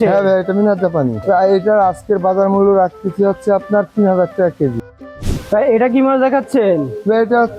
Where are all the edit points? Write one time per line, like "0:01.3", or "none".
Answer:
0:01.2
0:04.8